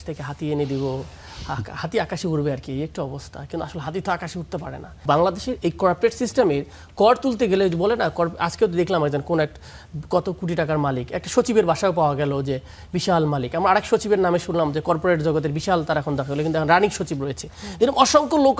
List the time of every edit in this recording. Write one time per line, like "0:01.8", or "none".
0:05.0